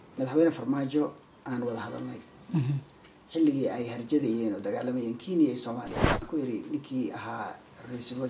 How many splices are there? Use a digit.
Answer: 1